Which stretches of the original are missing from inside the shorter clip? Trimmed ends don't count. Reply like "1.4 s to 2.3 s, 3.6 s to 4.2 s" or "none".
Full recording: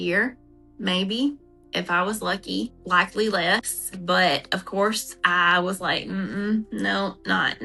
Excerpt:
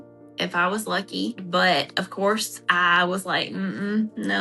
2.8 s to 4.0 s

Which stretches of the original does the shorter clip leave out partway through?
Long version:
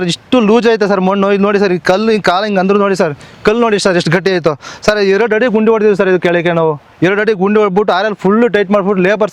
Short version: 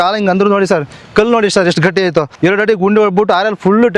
4.6 s to 6.9 s

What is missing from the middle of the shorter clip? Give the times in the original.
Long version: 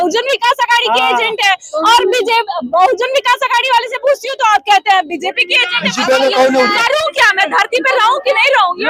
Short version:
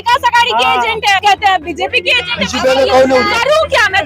1.6 s to 4.6 s

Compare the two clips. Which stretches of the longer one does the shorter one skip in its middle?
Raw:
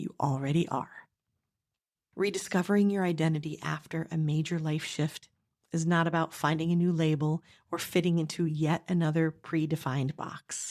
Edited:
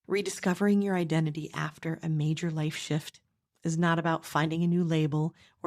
none

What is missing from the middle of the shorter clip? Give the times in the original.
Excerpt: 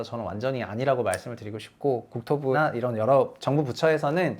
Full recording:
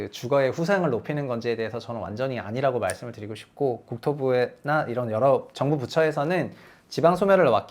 4.3 s to 4.7 s

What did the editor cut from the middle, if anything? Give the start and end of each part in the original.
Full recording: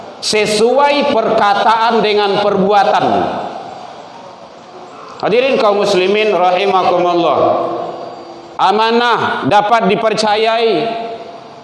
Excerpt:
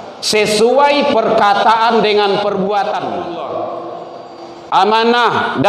3.2 s to 7.1 s

